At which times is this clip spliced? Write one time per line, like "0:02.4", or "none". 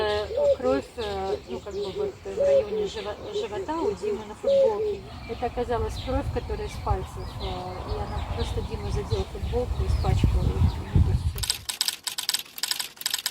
none